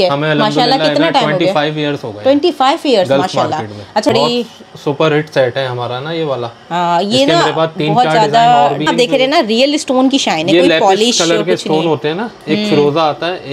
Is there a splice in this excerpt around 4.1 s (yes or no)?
yes